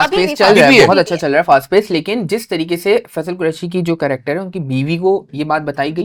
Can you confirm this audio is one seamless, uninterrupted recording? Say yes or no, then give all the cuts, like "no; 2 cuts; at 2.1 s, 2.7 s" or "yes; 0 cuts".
yes; 0 cuts